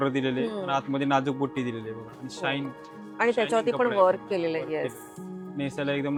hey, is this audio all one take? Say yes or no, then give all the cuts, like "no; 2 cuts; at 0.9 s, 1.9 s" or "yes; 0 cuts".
yes; 0 cuts